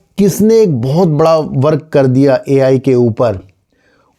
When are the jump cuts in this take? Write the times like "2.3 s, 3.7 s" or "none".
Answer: none